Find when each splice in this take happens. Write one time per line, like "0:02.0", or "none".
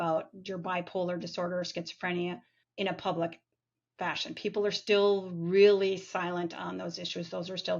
0:02.6